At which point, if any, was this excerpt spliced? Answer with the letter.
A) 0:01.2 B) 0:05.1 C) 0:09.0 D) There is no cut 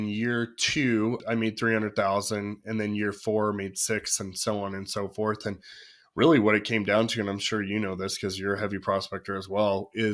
A